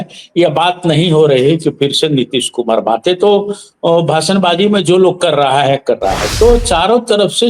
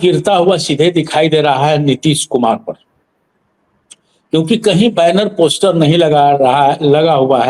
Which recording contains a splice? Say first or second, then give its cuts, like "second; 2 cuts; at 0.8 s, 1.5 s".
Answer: first; 1 cut; at 6.2 s